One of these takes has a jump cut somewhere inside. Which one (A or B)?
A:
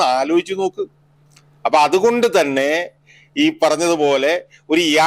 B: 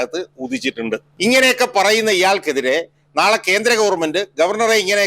B